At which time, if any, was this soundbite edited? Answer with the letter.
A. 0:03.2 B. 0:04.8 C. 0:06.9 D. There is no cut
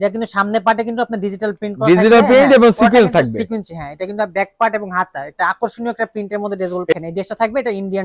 C